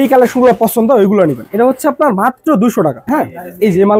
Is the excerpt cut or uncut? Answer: cut